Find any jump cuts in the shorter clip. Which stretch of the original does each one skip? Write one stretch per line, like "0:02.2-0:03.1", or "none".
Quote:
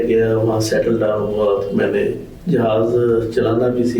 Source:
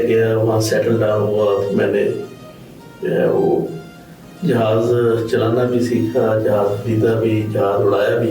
0:02.3-0:04.3